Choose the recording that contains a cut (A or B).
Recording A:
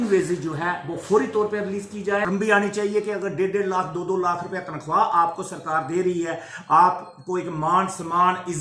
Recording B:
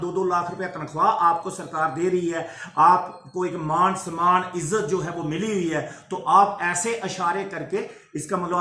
A